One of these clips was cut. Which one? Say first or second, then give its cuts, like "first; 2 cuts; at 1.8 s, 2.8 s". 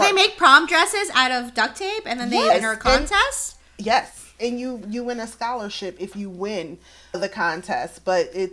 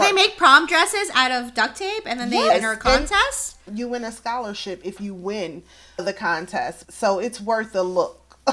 second; 2 cuts; at 3.7 s, 6.8 s